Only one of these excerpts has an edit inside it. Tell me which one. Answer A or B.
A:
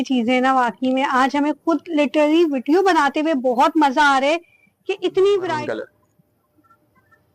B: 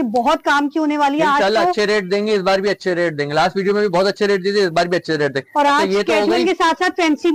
A